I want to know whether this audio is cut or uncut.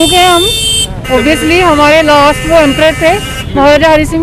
uncut